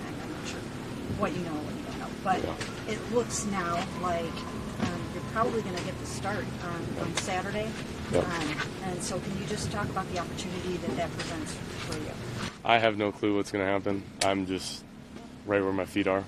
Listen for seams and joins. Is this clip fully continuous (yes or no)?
yes